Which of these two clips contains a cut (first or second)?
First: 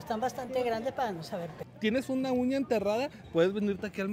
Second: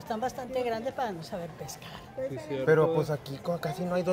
first